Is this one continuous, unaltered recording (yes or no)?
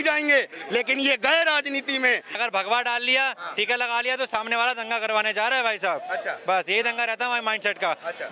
no